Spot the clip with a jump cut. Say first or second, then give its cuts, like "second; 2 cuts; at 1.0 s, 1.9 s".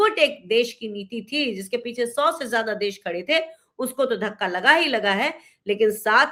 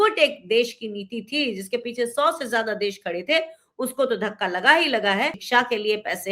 second; 1 cut; at 5.4 s